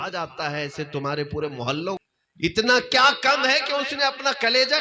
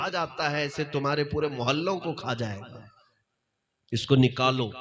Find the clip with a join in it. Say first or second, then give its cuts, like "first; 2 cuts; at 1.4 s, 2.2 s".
first; 1 cut; at 2.0 s